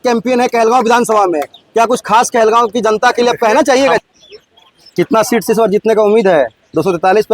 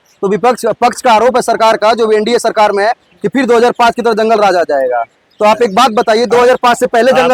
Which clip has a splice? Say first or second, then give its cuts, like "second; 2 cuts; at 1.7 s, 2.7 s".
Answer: first; 1 cut; at 4.0 s